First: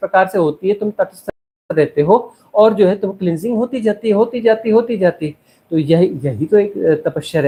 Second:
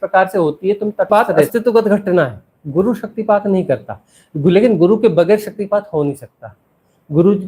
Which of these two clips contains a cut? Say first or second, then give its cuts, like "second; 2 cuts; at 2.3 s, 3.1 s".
second; 1 cut; at 1.1 s